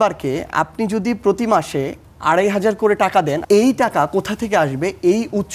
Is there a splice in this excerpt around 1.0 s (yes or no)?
no